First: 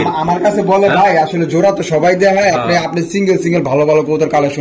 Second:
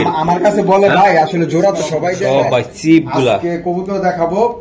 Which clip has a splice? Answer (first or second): second